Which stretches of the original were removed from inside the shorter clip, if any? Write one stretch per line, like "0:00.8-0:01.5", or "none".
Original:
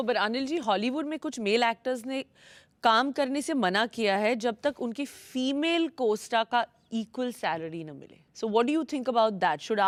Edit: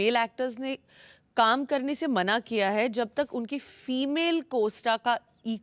none